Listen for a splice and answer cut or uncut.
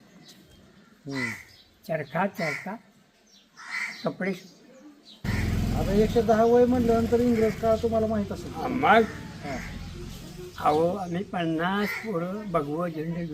cut